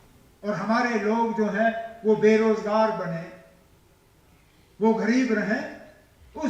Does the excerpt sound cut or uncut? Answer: uncut